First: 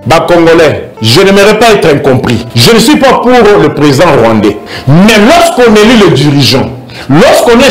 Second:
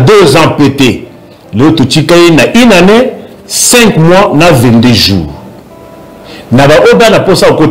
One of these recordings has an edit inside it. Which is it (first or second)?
first